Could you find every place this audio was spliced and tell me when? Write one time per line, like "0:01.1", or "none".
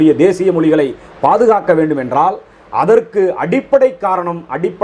none